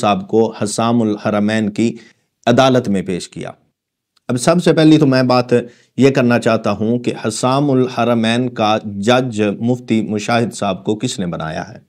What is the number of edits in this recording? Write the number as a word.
zero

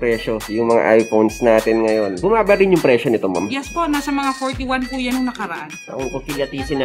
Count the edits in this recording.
two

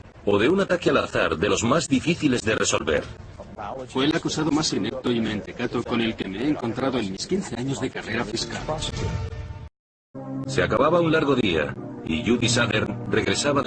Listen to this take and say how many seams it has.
zero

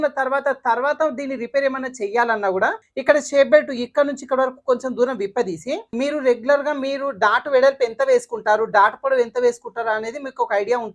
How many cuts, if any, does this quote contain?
two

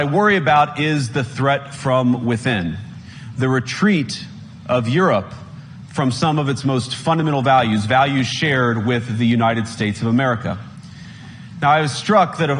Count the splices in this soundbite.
zero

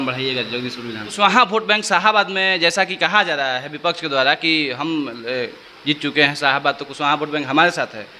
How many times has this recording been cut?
one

